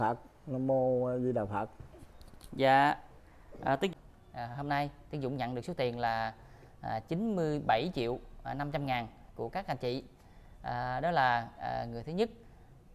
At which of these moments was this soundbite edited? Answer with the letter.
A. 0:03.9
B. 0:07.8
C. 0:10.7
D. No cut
A